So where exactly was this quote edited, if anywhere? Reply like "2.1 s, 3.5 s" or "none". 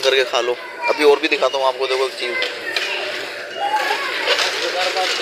none